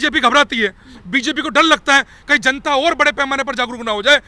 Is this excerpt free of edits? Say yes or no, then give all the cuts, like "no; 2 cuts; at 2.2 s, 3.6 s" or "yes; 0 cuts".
yes; 0 cuts